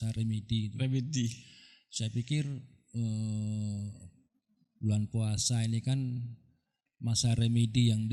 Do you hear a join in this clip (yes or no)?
no